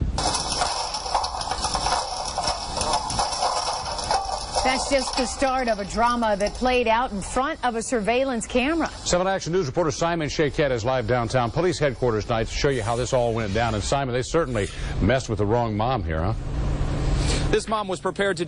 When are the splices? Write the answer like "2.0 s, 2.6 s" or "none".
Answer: 12.7 s